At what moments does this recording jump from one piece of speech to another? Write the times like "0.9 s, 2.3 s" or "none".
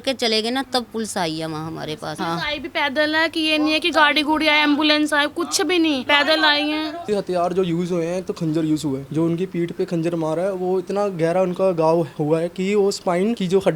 2.1 s, 6.0 s, 7.0 s